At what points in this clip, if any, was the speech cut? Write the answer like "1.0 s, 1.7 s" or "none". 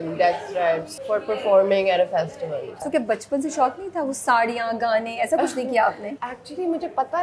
0.9 s, 2.8 s, 6.2 s